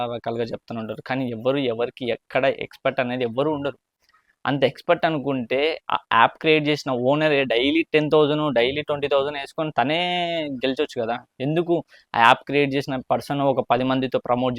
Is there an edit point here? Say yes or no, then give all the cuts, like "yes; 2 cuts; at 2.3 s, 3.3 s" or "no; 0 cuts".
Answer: no; 0 cuts